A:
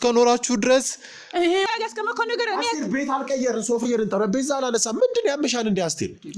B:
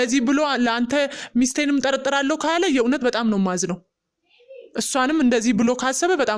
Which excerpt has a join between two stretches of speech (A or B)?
A